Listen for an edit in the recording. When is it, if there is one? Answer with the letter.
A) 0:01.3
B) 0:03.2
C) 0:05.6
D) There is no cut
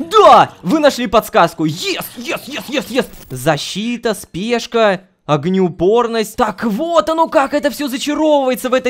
B